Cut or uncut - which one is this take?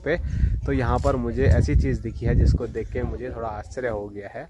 uncut